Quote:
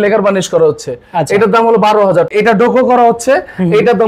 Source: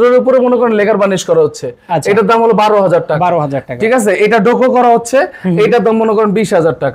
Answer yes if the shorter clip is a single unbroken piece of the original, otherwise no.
no